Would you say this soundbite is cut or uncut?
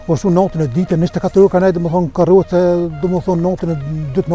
uncut